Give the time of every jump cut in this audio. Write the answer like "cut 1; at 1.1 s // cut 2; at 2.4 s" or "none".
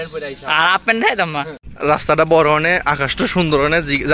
cut 1; at 1.6 s